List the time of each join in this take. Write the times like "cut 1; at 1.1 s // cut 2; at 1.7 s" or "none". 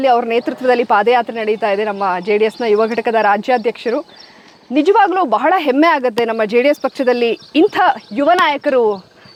none